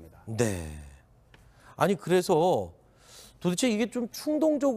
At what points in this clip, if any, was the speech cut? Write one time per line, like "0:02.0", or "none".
0:02.0